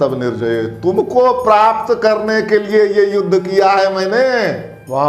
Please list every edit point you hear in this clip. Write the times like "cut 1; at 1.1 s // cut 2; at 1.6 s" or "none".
none